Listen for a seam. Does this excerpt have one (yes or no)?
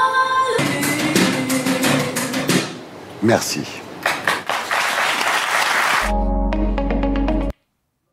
no